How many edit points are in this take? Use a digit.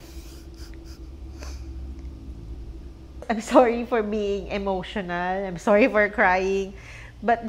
1